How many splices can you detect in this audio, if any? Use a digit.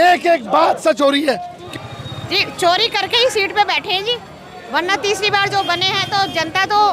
1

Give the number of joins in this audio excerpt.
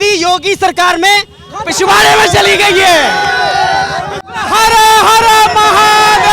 1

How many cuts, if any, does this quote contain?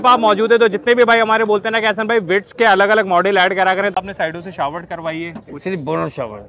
1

